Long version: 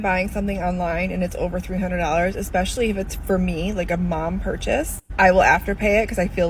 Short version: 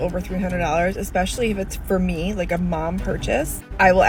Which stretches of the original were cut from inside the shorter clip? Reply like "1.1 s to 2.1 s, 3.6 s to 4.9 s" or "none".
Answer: none